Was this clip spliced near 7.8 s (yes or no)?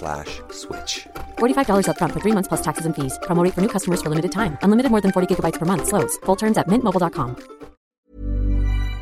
yes